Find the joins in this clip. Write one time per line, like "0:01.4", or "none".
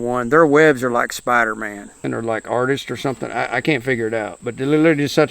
0:02.0